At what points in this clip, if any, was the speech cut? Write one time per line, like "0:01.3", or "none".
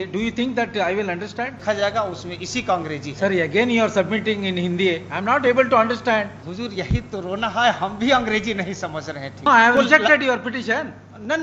0:01.6
0:06.4
0:09.5

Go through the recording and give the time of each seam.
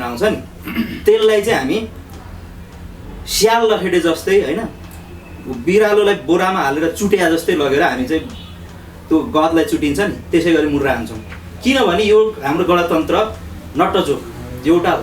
none

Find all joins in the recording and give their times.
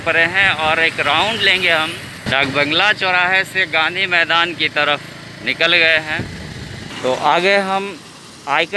0:02.2
0:06.9

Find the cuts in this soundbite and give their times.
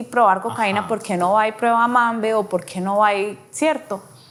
none

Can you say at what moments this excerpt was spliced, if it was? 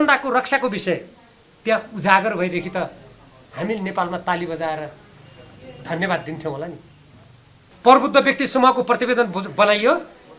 0:07.7

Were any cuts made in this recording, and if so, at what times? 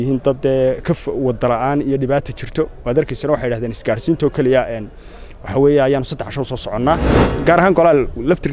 0:07.3

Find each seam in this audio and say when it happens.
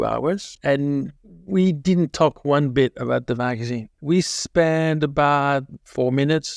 none

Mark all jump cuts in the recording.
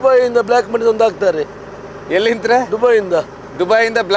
none

